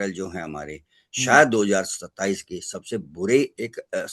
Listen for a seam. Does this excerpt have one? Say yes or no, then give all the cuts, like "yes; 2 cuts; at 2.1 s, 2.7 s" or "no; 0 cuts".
no; 0 cuts